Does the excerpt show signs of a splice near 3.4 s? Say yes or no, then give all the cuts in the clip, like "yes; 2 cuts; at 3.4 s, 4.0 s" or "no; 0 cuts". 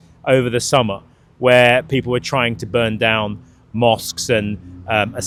no; 0 cuts